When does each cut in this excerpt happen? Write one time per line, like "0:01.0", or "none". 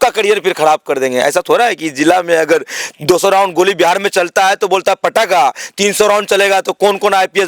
none